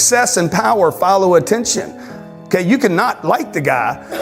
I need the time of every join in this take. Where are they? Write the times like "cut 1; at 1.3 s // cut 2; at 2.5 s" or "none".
none